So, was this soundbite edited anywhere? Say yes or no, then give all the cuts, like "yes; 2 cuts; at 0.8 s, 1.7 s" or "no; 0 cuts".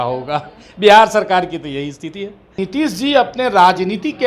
yes; 1 cut; at 2.6 s